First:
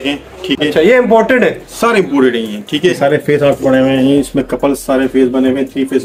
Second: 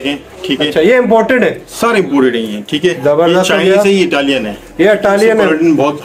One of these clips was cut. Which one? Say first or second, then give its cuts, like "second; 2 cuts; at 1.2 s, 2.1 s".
first; 1 cut; at 3.0 s